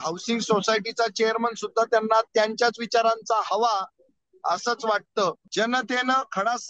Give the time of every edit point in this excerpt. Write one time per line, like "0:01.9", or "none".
0:05.4